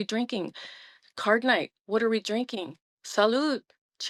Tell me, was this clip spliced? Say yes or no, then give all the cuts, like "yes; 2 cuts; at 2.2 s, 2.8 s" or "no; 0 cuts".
no; 0 cuts